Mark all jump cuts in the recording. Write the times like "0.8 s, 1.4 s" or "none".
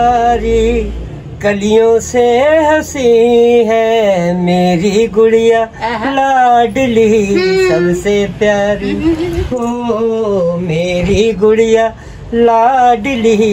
none

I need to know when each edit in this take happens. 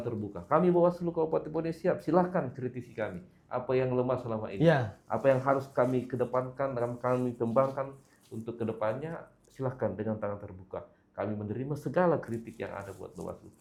none

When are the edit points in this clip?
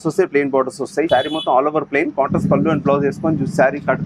1.1 s

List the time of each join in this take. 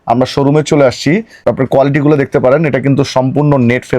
1.4 s

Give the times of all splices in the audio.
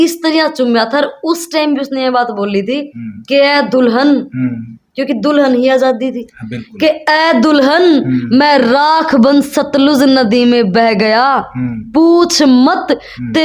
none

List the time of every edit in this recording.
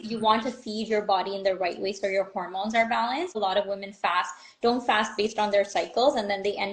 3.3 s

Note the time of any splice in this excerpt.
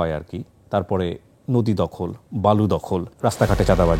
3.1 s

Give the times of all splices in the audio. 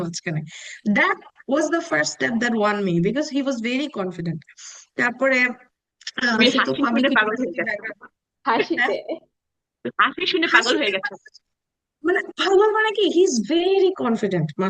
none

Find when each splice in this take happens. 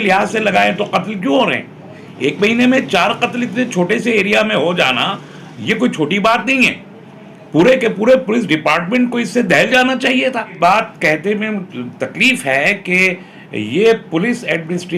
10.5 s

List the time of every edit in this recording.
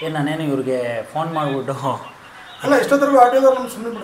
none

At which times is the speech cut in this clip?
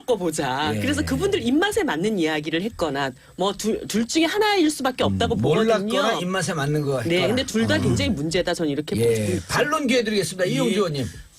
8.5 s

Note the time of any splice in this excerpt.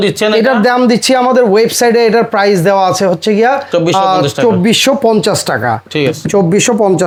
none

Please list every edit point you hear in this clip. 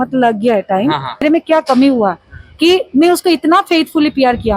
1.2 s

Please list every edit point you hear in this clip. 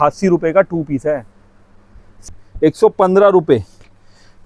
2.2 s

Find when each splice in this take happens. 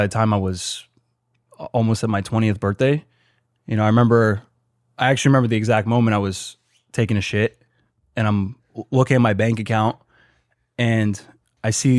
none

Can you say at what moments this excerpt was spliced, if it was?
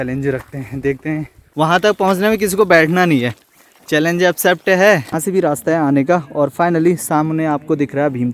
1.4 s, 5.1 s

